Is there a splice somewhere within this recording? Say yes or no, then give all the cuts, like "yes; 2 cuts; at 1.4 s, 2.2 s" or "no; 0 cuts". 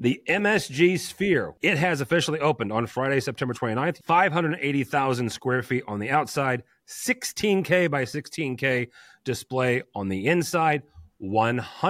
yes; 2 cuts; at 1.5 s, 4.0 s